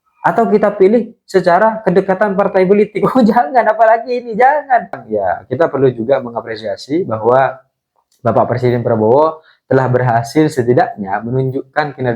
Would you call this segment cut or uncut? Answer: cut